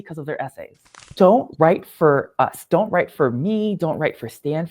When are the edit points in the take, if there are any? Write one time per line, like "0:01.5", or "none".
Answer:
0:01.0
0:02.7